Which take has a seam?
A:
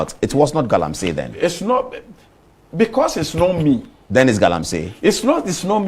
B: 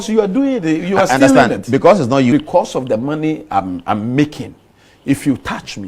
B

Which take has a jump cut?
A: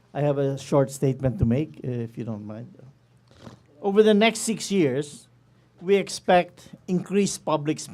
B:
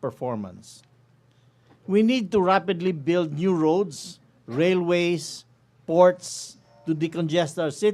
A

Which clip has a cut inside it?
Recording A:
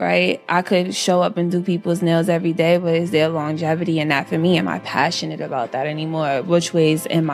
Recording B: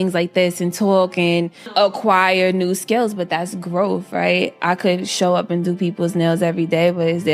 B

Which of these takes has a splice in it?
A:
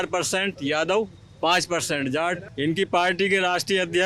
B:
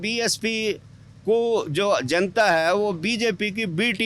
A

